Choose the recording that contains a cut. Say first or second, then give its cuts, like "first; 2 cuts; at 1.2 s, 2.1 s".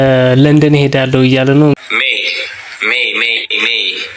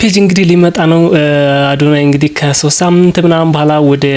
first; 1 cut; at 1.7 s